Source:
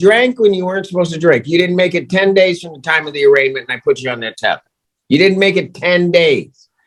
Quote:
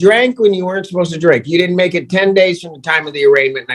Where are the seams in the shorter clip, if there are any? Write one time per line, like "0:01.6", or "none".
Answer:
none